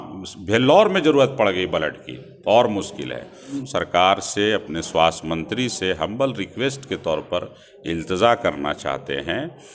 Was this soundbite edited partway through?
yes; 1 cut; at 3.6 s

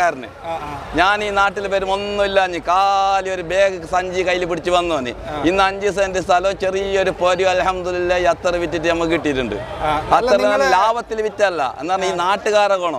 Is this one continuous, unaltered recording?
yes; 0 cuts

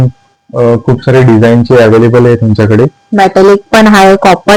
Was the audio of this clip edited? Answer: no; 0 cuts

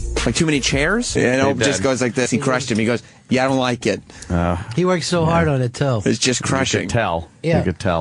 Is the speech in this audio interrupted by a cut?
no; 0 cuts

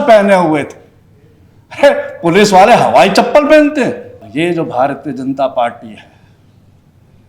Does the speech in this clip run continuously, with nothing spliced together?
no; 1 cut; at 4.3 s

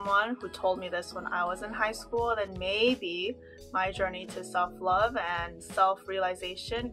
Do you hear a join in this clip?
no; 0 cuts

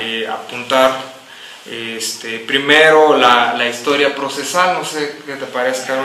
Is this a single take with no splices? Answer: no; 1 cut; at 4.7 s

